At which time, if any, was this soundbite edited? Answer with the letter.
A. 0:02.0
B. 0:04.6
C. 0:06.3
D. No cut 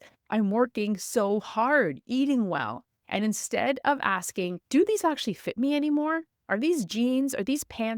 B